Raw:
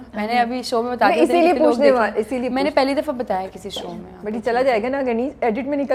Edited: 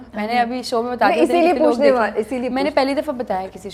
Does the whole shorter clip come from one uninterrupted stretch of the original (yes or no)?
yes